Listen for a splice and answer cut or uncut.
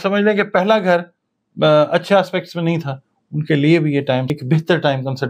cut